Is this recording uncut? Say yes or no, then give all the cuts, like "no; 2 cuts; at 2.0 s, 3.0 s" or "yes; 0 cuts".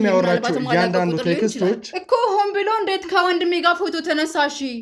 yes; 0 cuts